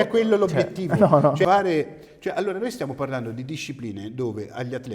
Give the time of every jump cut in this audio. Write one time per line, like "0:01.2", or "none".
0:01.4